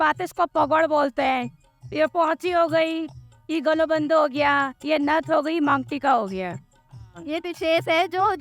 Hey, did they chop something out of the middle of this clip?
no; 0 cuts

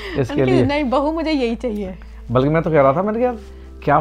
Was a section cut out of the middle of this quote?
no; 0 cuts

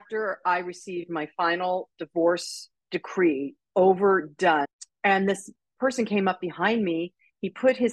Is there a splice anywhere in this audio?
yes; 1 cut; at 4.7 s

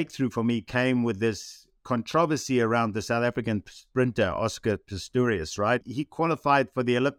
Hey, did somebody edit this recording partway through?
yes; 1 cut; at 5.9 s

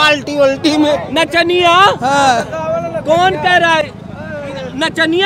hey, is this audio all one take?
yes; 0 cuts

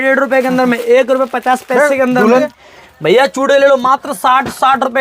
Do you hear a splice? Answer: yes; 1 cut; at 2.6 s

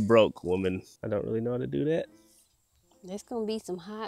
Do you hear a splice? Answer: yes; 1 cut; at 0.9 s

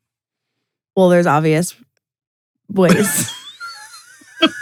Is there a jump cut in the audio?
no; 0 cuts

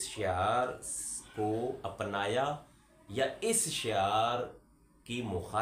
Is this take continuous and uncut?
yes; 0 cuts

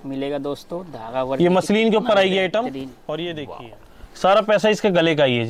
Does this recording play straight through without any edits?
no; 1 cut; at 3.4 s

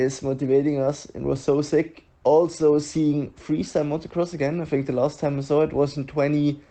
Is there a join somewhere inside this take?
no; 0 cuts

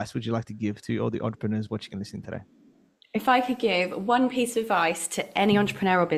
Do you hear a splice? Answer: no; 0 cuts

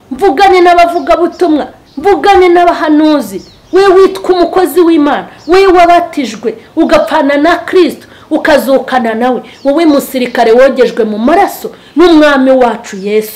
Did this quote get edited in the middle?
no; 0 cuts

